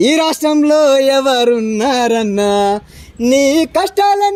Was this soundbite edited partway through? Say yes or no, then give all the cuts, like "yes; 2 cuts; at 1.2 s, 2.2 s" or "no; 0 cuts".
no; 0 cuts